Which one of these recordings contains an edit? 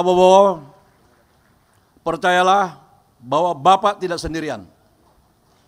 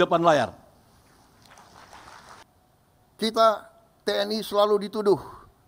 second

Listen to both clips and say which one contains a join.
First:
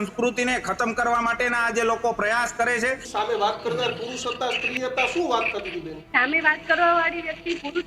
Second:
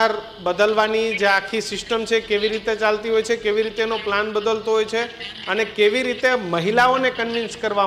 first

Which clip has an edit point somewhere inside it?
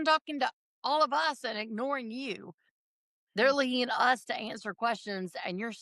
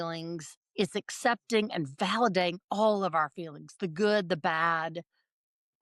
second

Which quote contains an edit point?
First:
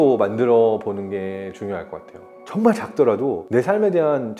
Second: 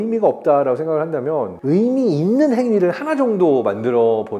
first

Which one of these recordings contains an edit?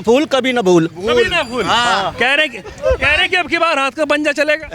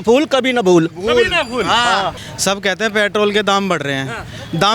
second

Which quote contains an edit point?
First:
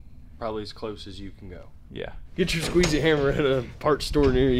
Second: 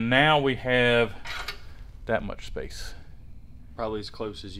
first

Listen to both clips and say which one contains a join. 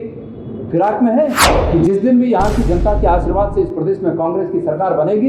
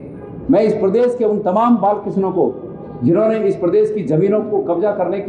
first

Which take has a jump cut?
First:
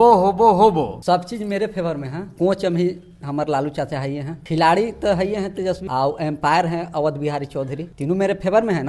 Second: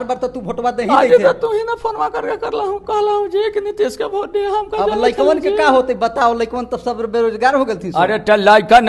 first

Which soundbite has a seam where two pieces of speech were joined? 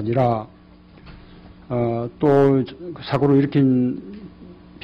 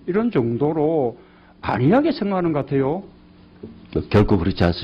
second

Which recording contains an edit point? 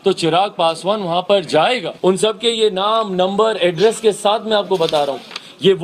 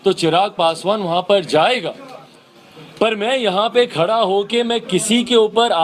first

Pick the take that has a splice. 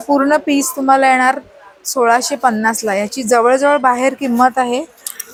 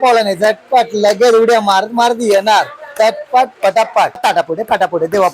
second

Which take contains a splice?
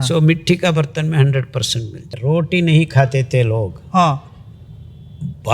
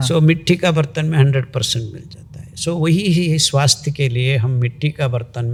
first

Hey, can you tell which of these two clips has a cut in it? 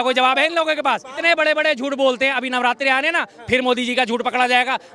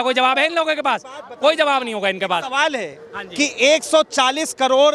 first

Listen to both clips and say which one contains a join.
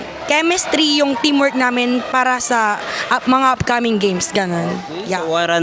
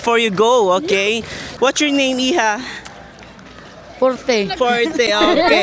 second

